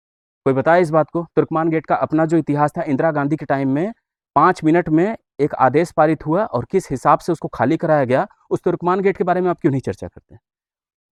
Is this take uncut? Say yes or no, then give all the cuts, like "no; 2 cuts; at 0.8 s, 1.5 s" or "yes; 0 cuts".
yes; 0 cuts